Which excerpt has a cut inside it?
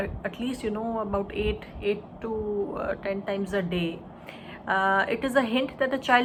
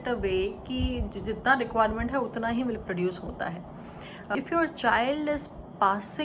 second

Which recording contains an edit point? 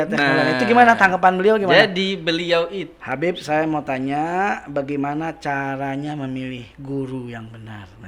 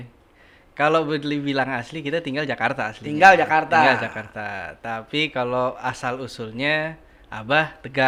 first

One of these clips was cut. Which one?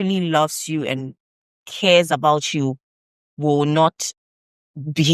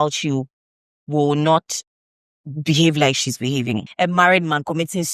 second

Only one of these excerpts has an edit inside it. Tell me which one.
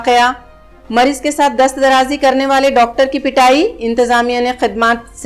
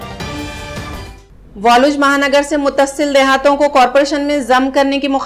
second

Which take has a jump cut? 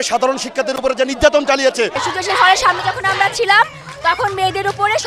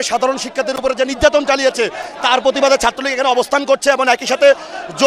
first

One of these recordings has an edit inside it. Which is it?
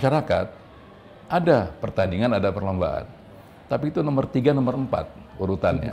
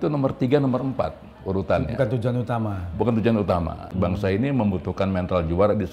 second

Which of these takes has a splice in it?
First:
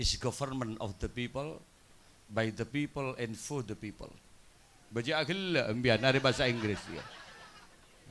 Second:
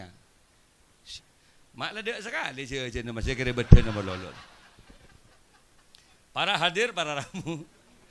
second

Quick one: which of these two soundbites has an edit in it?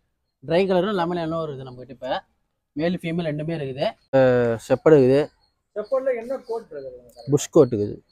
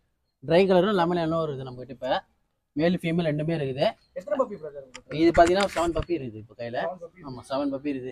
first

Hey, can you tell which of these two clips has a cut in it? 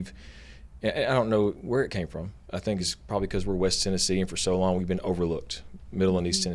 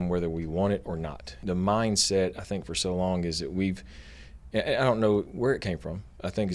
second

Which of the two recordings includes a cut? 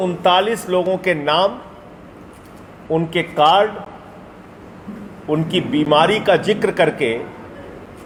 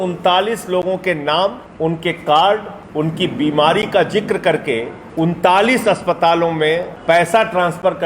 second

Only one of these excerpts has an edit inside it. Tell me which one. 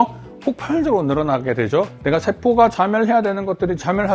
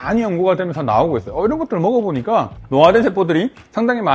first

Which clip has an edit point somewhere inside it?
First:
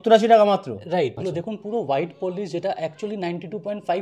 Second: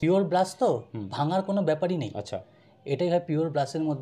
first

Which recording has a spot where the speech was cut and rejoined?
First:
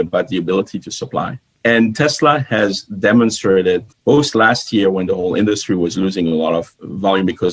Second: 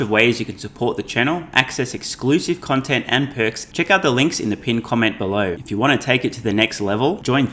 second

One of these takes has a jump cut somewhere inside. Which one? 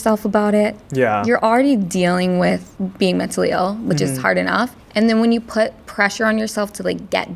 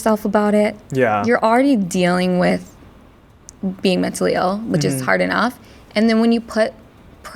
first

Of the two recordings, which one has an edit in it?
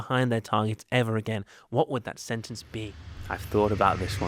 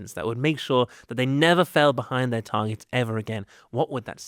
first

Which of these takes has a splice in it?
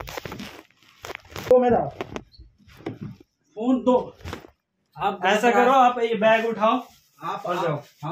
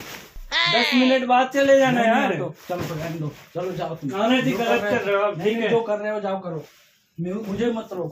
first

